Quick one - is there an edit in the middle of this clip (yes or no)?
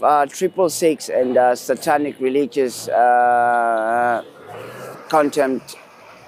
no